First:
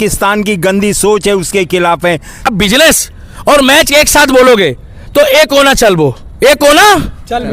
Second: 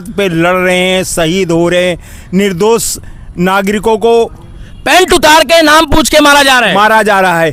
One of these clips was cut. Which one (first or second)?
first